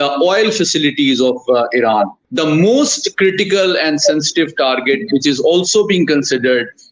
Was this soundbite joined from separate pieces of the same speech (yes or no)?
yes